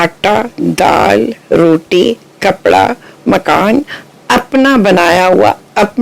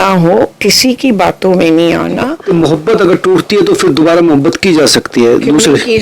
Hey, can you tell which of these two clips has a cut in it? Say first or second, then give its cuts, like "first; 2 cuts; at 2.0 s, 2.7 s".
second; 1 cut; at 2.3 s